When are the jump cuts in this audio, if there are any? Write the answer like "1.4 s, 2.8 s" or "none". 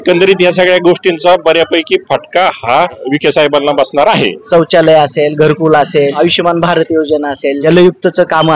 3.1 s, 4.4 s, 6.2 s, 7.6 s